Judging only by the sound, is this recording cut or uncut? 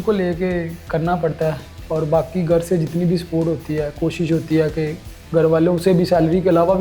uncut